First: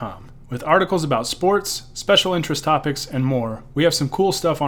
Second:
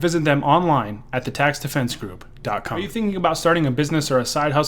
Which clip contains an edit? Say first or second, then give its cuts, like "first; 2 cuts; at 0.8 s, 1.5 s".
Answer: second; 1 cut; at 2.9 s